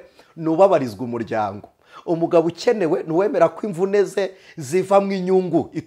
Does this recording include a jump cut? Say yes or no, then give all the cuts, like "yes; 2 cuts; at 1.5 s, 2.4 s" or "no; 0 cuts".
no; 0 cuts